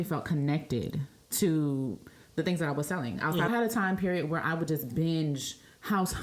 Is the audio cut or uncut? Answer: cut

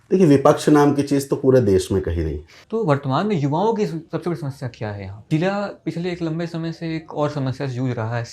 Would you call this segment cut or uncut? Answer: cut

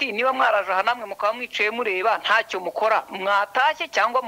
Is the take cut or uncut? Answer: uncut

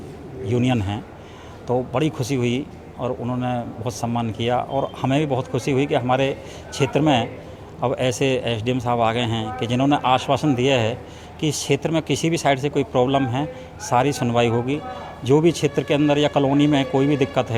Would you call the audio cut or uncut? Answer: uncut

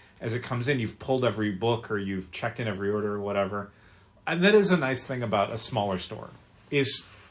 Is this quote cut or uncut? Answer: uncut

